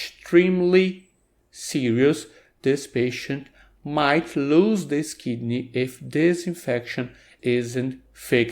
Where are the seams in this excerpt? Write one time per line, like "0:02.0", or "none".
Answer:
0:07.3